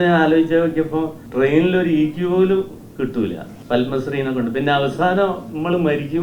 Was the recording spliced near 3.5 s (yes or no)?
yes